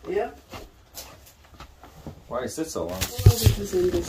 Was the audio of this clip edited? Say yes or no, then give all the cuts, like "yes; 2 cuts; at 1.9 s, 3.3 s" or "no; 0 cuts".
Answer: yes; 1 cut; at 3.1 s